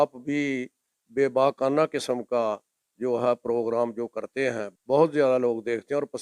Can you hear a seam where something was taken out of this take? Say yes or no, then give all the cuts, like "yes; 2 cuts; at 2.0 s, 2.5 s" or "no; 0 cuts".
yes; 1 cut; at 4.7 s